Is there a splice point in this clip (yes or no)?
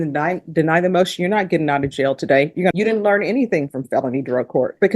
yes